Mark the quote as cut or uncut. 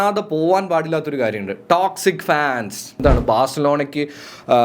cut